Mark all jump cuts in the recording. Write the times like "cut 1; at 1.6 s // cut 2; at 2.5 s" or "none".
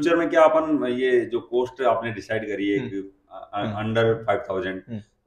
none